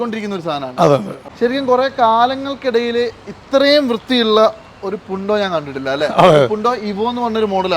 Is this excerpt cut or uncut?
cut